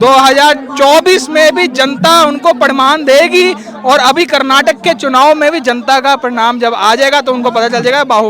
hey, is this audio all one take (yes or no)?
yes